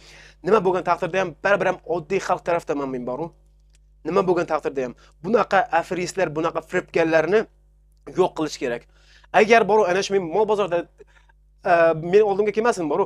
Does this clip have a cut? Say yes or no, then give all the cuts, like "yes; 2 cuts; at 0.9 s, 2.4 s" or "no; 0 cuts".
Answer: no; 0 cuts